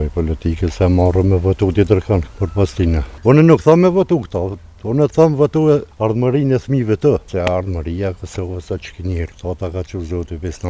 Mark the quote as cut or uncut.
cut